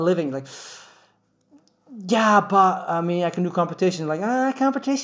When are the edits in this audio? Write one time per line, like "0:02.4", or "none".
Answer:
none

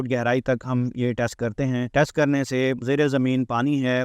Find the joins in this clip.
0:01.9
0:02.8

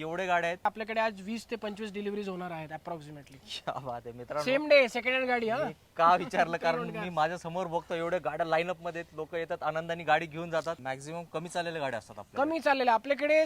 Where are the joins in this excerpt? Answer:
0:00.7
0:10.8

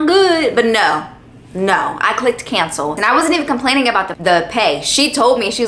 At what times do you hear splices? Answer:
0:03.0

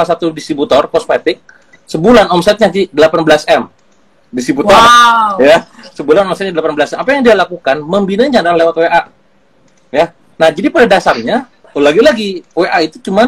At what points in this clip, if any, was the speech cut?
none

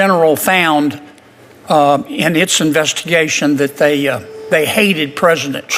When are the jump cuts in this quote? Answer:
none

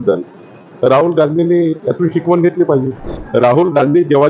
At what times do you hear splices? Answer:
0:03.1

